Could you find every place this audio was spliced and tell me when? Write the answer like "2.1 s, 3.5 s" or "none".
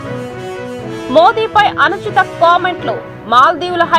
none

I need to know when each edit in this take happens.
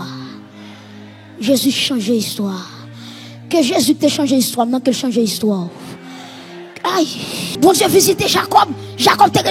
7.5 s

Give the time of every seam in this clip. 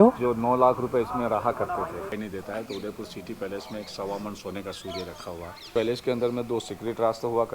2.1 s, 5.7 s

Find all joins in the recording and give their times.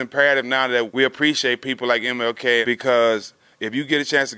0.9 s, 2.6 s

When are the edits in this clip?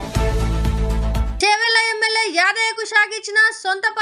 1.3 s

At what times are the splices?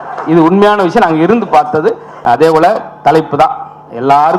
2.1 s

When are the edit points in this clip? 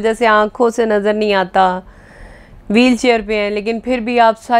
none

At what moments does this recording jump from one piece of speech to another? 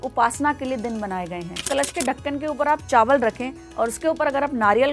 1.7 s

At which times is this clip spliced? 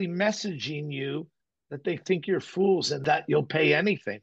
2.9 s

